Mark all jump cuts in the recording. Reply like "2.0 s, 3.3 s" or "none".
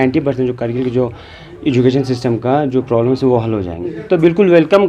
4.0 s